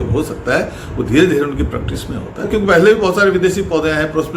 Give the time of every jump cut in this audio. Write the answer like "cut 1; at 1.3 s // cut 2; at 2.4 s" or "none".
cut 1; at 2.5 s